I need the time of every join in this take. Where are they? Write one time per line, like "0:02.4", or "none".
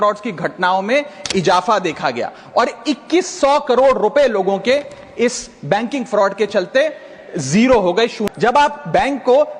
0:08.2